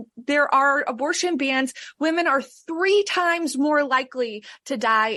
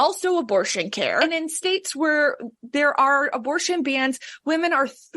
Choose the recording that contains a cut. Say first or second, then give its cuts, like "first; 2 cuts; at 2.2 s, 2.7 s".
second; 1 cut; at 1.2 s